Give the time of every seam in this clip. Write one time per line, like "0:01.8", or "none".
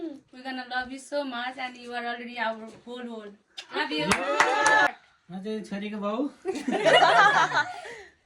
0:04.9